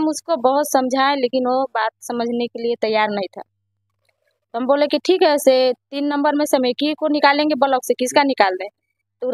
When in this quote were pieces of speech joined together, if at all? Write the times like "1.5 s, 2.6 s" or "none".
none